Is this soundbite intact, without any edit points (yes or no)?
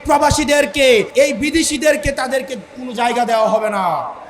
no